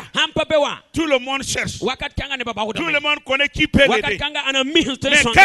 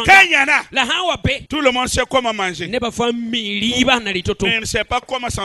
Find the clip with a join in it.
second; 1 cut; at 1.4 s

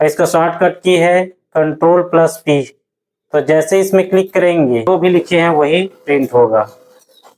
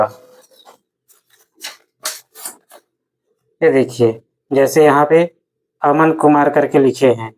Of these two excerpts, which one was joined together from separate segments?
first; 1 cut; at 4.9 s

